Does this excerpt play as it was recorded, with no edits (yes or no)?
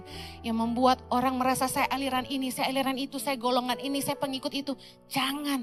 yes